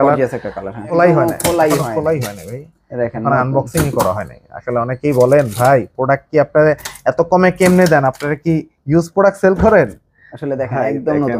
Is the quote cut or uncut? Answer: cut